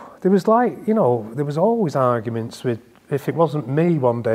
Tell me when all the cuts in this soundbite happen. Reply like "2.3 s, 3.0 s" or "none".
none